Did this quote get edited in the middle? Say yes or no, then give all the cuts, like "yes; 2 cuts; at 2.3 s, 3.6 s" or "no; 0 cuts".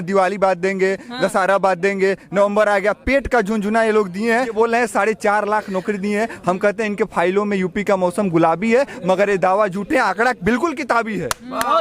yes; 1 cut; at 4.5 s